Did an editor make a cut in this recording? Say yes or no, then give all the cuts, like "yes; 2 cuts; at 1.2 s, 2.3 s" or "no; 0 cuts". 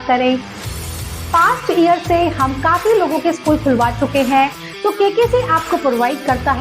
yes; 1 cut; at 4.6 s